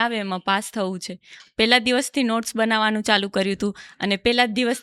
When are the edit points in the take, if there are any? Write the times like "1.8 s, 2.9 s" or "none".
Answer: none